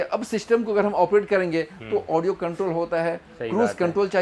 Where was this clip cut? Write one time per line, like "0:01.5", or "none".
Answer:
none